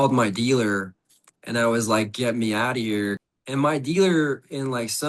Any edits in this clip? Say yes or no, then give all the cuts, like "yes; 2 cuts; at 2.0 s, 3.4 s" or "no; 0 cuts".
yes; 1 cut; at 3.2 s